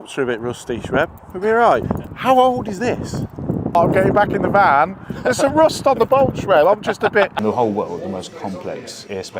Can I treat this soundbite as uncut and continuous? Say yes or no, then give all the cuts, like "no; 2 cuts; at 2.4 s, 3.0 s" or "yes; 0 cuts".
no; 3 cuts; at 2.0 s, 3.8 s, 7.4 s